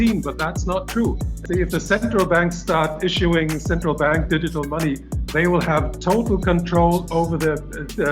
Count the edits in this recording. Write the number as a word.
one